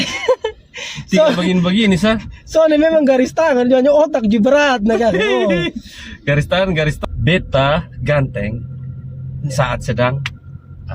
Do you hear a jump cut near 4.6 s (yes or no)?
no